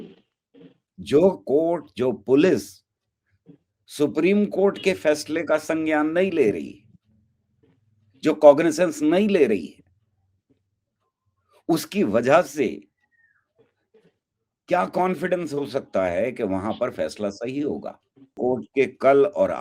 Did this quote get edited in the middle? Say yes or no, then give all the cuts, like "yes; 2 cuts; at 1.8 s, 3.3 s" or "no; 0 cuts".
yes; 1 cut; at 18.4 s